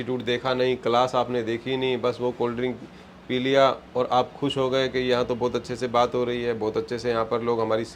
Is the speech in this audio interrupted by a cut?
no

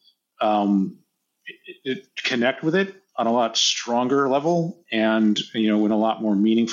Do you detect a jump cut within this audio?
no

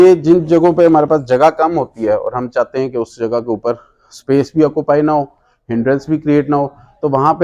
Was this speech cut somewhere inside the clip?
no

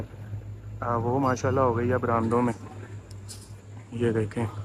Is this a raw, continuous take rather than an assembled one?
yes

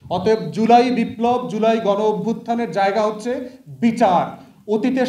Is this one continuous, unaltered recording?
yes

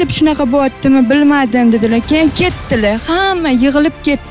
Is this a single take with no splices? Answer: yes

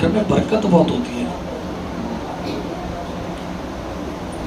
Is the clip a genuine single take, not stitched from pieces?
yes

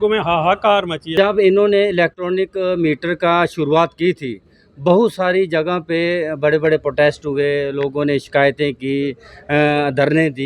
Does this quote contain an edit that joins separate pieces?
yes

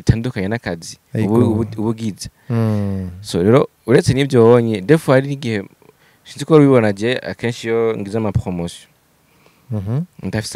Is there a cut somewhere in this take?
no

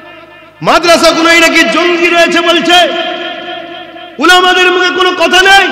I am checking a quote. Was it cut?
no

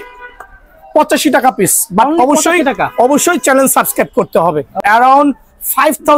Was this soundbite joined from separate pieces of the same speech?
yes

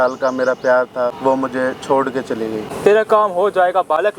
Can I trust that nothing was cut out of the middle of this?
no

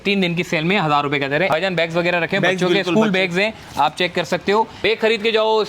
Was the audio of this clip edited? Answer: yes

